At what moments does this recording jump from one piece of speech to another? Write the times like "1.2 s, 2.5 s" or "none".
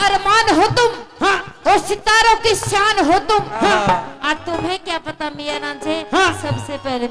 none